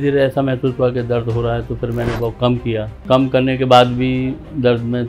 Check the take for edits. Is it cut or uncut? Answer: cut